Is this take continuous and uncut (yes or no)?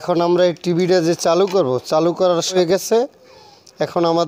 no